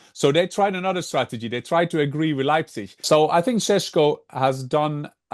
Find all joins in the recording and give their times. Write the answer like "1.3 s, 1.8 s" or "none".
3.0 s